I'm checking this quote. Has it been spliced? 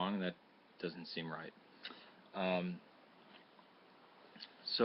yes; 1 cut; at 1.7 s

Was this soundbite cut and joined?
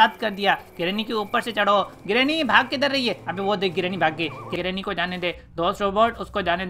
yes; 1 cut; at 4.5 s

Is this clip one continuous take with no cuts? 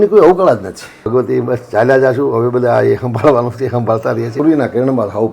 no; 2 cuts; at 1.0 s, 4.3 s

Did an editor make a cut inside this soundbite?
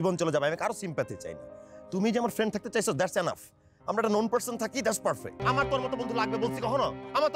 yes; 1 cut; at 5.4 s

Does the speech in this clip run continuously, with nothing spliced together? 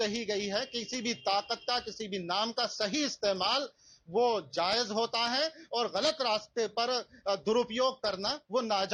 yes; 0 cuts

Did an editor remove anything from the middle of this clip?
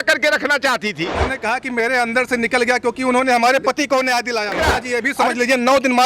yes; 2 cuts; at 1.3 s, 4.6 s

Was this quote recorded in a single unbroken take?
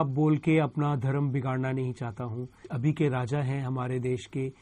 no; 1 cut; at 2.7 s

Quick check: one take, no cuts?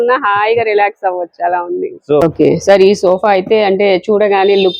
no; 1 cut; at 2.2 s

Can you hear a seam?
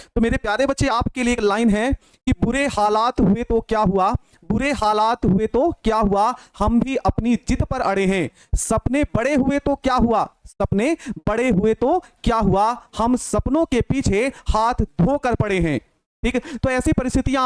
yes; 1 cut; at 2.4 s

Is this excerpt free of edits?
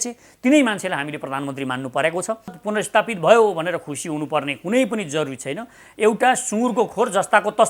no; 1 cut; at 2.5 s

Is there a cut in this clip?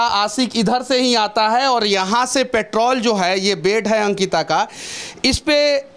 no; 0 cuts

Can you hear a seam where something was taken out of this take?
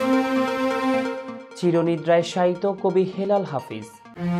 no; 0 cuts

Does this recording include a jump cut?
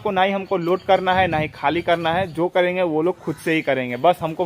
no; 0 cuts

